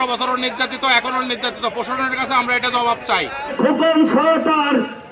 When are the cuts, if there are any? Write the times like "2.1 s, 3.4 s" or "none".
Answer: 3.5 s